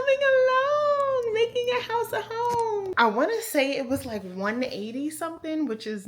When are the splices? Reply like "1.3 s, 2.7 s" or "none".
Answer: 2.9 s